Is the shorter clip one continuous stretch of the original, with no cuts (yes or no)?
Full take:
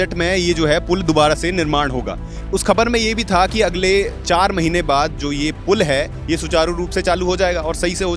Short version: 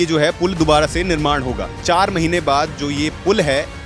no